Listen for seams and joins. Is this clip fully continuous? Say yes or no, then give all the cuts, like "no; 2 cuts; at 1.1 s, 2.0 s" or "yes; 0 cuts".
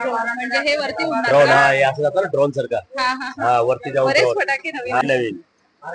no; 1 cut; at 5.0 s